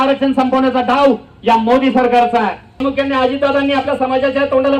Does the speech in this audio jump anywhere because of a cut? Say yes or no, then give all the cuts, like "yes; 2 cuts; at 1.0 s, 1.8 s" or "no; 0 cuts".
yes; 1 cut; at 2.8 s